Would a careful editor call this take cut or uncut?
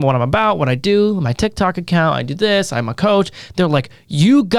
uncut